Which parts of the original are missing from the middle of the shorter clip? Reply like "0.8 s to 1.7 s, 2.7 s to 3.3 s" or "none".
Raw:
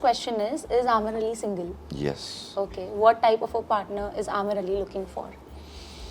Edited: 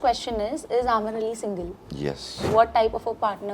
2.4 s to 2.9 s